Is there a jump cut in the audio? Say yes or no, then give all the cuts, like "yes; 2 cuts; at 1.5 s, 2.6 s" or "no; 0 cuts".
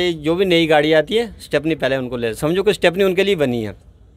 no; 0 cuts